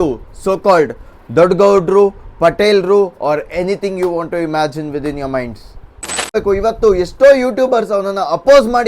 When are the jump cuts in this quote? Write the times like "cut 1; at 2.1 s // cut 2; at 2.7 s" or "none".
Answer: cut 1; at 6.3 s